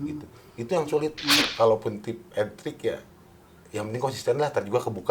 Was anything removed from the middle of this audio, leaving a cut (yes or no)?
yes